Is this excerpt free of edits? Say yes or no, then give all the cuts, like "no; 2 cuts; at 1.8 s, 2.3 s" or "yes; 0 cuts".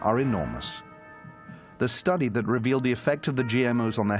no; 1 cut; at 2.0 s